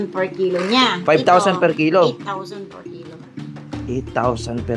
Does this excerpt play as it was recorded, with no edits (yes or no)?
yes